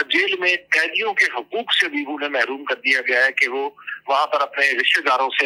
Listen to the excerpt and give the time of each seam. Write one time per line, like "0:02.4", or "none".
none